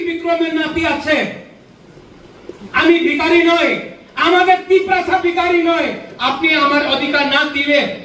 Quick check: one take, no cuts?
yes; 0 cuts

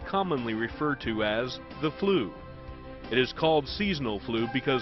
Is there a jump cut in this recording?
yes; 1 cut; at 2.0 s

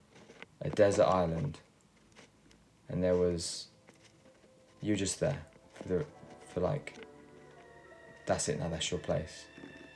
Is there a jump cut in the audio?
no; 0 cuts

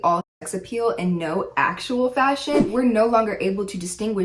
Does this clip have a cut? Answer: yes; 1 cut; at 2.7 s

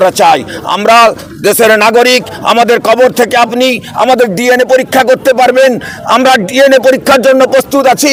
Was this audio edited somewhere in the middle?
no; 0 cuts

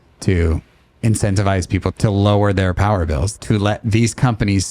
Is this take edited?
yes; 2 cuts; at 1.9 s, 3.3 s

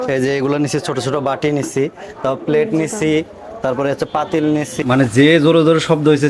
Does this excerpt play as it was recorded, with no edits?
no; 1 cut; at 4.8 s

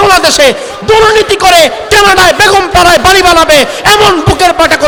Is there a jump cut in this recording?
no; 0 cuts

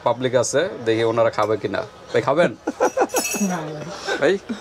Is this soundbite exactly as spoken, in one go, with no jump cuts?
yes; 0 cuts

